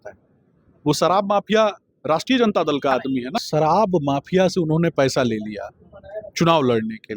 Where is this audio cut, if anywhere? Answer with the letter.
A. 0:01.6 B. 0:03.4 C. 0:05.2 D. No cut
B